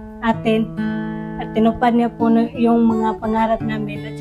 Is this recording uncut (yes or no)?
yes